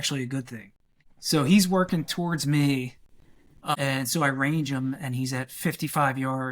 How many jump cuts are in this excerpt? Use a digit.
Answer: 2